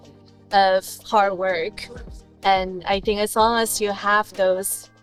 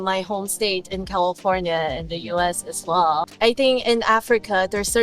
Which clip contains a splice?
second; 1 cut; at 3.2 s

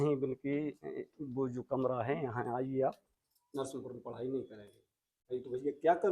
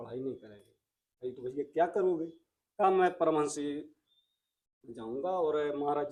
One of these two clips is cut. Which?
first; 1 cut; at 3.1 s

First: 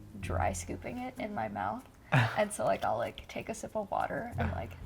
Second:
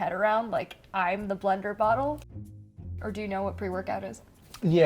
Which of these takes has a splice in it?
second; 1 cut; at 2.6 s

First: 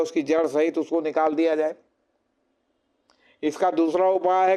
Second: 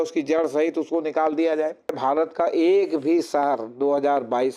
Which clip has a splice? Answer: second; 1 cut; at 2.0 s

